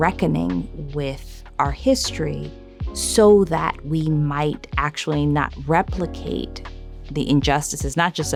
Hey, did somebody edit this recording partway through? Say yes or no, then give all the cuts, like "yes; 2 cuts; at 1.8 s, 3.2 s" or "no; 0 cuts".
no; 0 cuts